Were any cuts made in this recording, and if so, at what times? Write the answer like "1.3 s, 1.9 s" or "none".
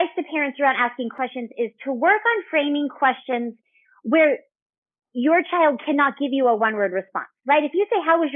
1.1 s